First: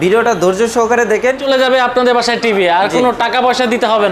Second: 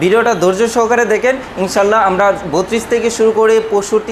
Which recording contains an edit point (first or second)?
first